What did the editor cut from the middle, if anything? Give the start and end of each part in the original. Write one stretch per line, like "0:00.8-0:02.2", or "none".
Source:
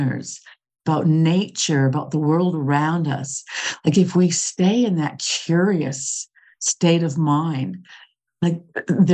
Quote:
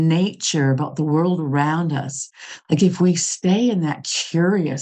none